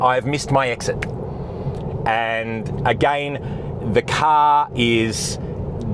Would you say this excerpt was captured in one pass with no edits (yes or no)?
yes